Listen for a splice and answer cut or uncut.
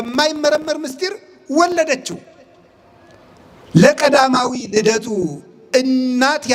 uncut